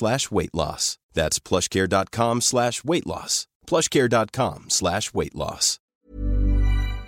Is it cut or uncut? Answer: cut